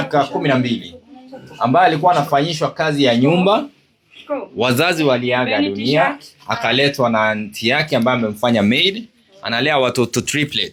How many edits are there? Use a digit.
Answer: 0